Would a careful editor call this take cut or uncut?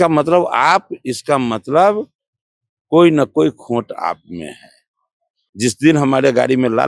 cut